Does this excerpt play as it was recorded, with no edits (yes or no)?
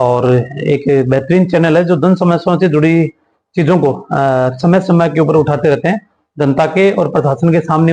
yes